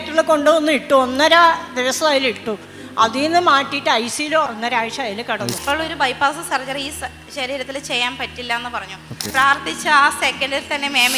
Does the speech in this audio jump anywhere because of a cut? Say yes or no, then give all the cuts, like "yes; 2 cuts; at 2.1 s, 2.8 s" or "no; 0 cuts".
yes; 3 cuts; at 4.5 s, 5.6 s, 9.2 s